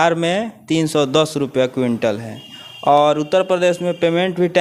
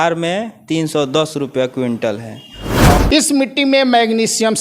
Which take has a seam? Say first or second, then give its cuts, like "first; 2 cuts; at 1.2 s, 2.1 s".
second; 1 cut; at 3.0 s